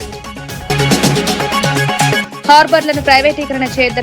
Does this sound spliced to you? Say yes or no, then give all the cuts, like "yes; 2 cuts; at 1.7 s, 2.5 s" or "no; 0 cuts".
yes; 2 cuts; at 0.7 s, 2.3 s